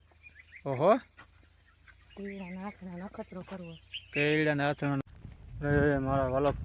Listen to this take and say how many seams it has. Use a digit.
1